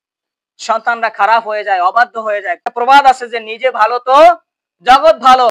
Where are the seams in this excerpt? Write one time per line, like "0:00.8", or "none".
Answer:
0:02.6